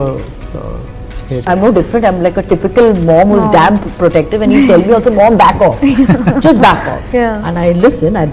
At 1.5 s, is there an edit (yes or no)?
yes